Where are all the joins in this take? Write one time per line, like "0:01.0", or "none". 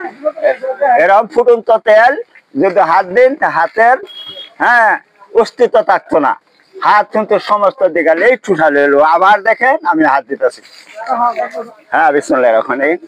none